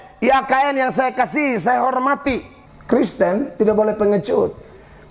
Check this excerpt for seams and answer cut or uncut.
cut